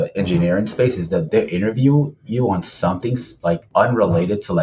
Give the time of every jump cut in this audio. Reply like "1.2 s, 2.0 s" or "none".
1.2 s, 3.5 s